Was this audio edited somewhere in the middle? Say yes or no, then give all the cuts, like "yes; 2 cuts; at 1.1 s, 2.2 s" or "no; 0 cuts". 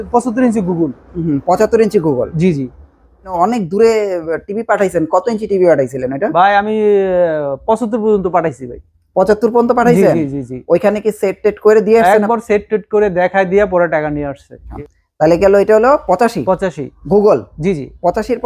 yes; 2 cuts; at 3.3 s, 14.7 s